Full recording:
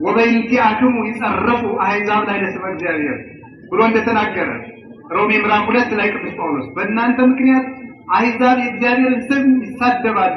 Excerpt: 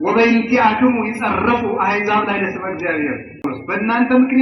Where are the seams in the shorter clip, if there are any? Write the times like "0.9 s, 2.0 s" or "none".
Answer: 3.4 s